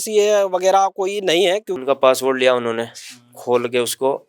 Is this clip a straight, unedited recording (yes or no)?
no